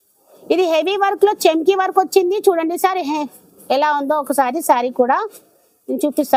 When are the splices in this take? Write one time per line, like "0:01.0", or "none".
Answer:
none